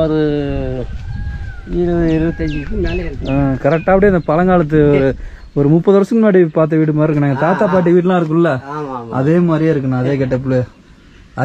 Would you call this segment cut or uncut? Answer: uncut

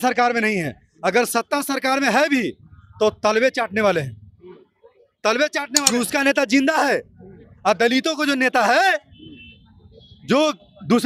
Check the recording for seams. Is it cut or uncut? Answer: cut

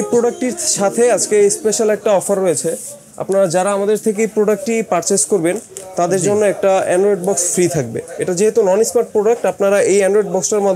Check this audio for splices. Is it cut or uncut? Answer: uncut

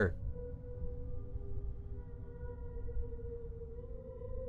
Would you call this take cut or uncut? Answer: uncut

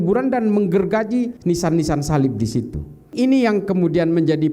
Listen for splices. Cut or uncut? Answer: cut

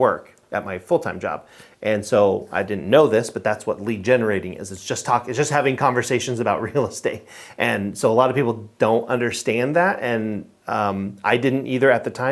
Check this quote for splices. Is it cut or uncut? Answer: uncut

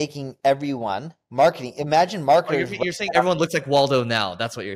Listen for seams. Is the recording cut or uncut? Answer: uncut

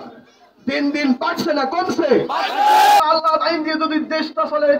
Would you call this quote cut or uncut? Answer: cut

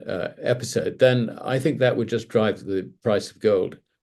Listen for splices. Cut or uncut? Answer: uncut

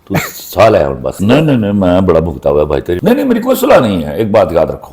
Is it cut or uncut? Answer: cut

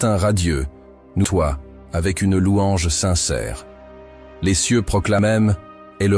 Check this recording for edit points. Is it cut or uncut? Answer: cut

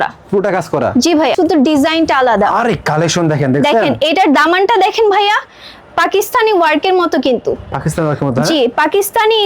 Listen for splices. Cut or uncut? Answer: cut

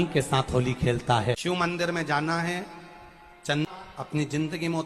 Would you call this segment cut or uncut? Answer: cut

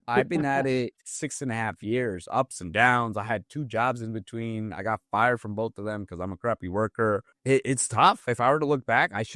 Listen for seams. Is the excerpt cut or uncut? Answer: uncut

